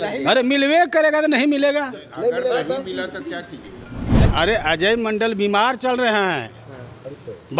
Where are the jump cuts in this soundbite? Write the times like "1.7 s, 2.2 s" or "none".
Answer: 4.3 s